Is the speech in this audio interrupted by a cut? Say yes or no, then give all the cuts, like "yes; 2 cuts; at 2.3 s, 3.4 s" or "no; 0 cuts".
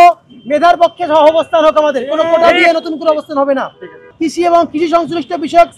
yes; 1 cut; at 4.2 s